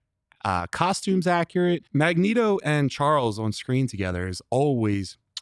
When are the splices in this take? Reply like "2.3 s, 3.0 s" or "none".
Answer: 1.9 s